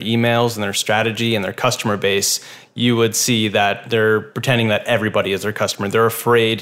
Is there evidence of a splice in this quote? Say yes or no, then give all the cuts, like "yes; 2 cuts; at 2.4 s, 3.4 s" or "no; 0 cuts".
yes; 1 cut; at 3.8 s